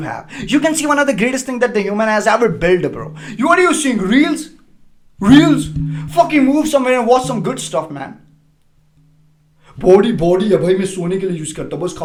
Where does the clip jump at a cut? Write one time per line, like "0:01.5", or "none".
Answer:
none